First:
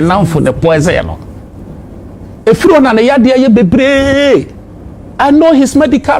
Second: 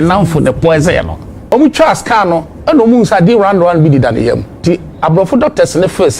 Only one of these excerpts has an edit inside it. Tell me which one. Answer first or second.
second